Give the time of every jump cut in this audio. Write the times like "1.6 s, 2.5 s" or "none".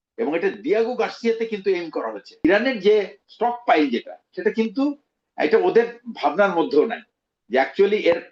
2.4 s, 3.2 s